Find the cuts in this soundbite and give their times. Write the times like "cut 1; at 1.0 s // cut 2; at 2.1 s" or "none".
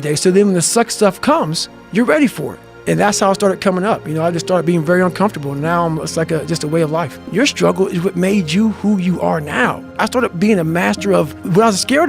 cut 1; at 7.3 s // cut 2; at 10.0 s